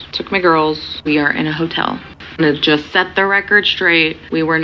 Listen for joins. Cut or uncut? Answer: cut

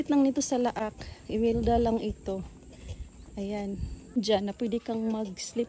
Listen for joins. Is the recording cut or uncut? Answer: cut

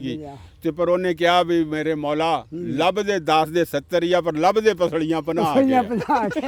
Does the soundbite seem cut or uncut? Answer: uncut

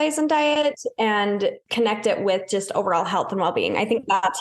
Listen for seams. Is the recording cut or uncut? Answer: cut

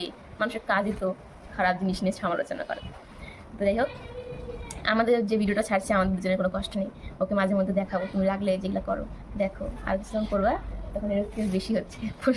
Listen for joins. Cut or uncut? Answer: uncut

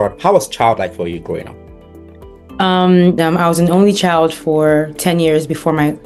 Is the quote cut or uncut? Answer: cut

